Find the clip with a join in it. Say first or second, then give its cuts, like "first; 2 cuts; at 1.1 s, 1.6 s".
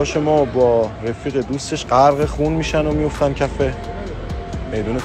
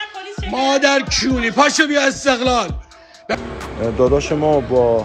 second; 1 cut; at 3.2 s